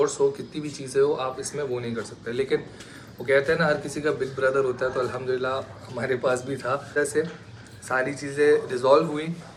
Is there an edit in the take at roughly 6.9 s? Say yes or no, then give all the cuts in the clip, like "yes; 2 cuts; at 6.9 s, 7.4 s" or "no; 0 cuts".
no; 0 cuts